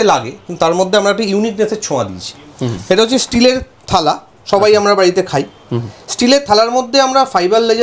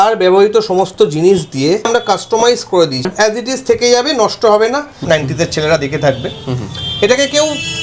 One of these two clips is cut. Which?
second; 3 cuts; at 1.9 s, 3.0 s, 5.0 s

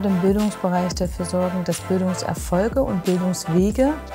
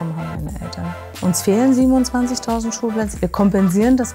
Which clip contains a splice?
second; 2 cuts; at 1.2 s, 3.1 s

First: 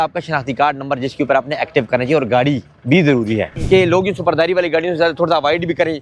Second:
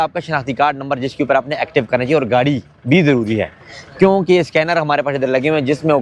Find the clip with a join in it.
first; 1 cut; at 3.5 s

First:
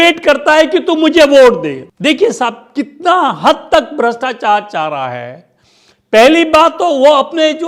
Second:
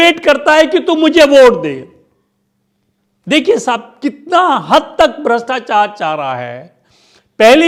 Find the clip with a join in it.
first; 1 cut; at 1.9 s

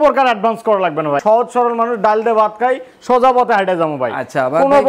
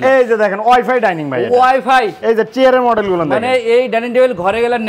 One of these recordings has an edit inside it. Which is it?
first; 1 cut; at 1.2 s

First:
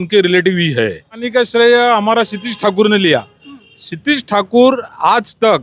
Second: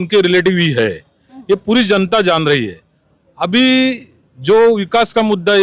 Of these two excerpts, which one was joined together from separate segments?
first; 1 cut; at 1.2 s

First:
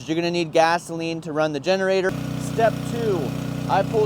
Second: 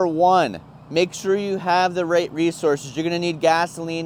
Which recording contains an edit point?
first; 1 cut; at 2.2 s

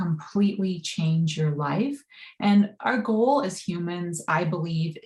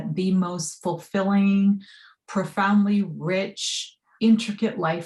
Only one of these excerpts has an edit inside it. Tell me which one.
second; 1 cut; at 4.1 s

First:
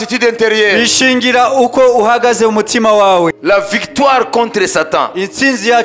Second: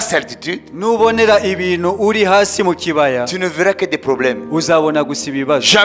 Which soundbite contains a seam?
first; 1 cut; at 3.3 s

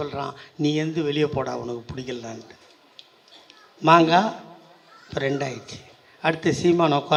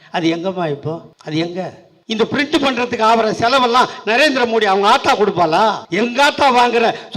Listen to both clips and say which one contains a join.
second; 3 cuts; at 1.1 s, 1.9 s, 5.8 s

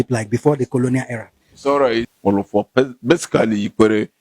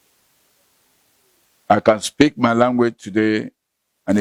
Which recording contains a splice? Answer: first; 1 cut; at 2.1 s

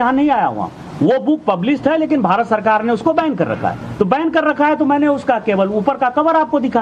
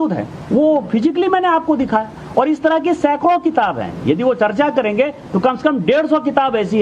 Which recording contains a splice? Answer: first; 1 cut; at 4.1 s

